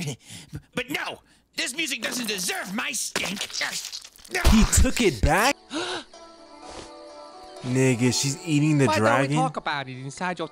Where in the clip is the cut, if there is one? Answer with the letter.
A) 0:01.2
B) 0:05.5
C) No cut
B